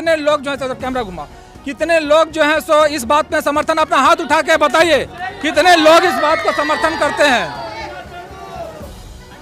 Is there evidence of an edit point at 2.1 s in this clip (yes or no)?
no